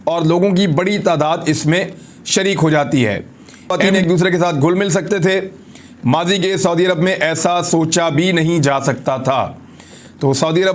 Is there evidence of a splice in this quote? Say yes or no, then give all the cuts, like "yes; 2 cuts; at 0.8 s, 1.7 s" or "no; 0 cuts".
yes; 1 cut; at 3.8 s